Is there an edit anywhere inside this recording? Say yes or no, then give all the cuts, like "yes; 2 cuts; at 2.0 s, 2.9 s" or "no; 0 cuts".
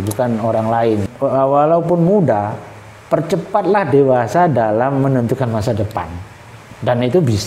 yes; 1 cut; at 1.0 s